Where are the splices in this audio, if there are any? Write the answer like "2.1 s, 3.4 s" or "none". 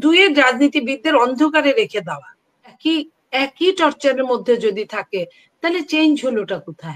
2.8 s